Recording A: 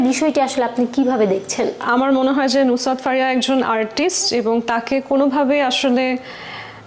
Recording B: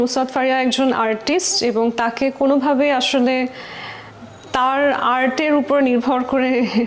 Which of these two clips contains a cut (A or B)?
A